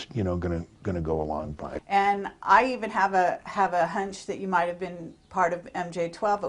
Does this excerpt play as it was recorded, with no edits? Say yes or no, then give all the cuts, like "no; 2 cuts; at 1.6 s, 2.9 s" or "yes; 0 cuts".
no; 1 cut; at 1.7 s